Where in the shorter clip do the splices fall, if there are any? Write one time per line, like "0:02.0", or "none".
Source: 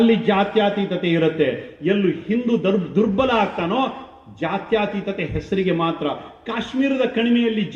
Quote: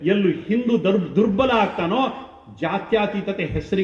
none